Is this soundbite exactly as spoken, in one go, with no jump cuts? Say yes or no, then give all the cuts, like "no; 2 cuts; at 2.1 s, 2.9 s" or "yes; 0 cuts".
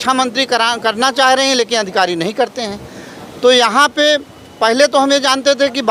yes; 0 cuts